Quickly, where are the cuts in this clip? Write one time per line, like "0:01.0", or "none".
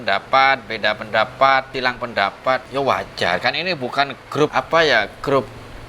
0:02.1
0:04.5

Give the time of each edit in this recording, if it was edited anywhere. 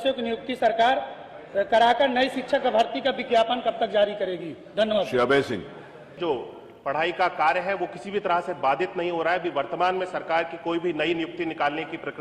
0:06.2

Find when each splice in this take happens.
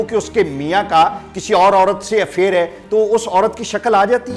none

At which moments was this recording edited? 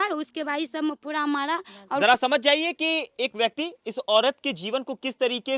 0:02.0

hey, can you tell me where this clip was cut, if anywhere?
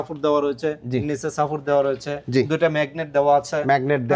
none

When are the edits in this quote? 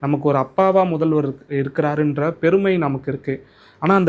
none

